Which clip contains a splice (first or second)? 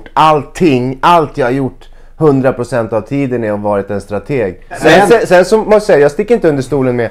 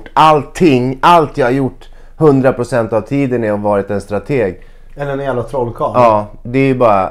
first